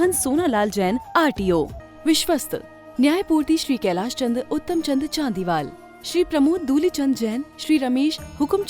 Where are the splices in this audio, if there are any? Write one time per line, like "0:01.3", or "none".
0:01.8